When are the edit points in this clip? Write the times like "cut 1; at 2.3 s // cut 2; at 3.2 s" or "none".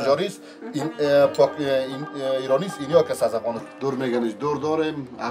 cut 1; at 3.7 s

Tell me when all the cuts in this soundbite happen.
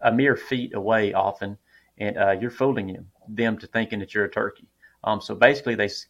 none

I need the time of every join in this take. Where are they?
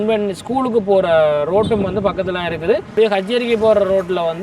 cut 1; at 2.9 s

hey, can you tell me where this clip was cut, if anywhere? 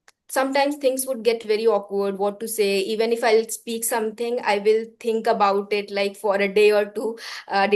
none

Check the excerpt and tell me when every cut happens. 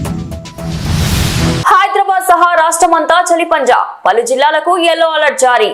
cut 1; at 1.6 s

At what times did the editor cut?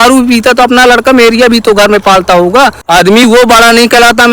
cut 1; at 2.8 s

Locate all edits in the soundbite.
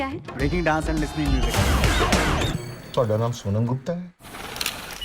cut 1; at 2.5 s

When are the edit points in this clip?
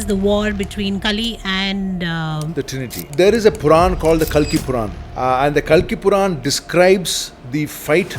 cut 1; at 3.1 s // cut 2; at 5.0 s

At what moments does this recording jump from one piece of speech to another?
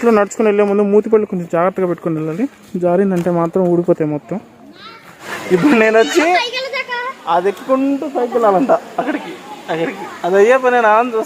cut 1; at 5.3 s

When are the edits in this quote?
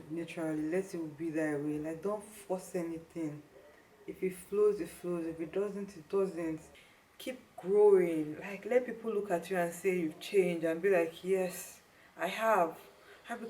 cut 1; at 6.7 s

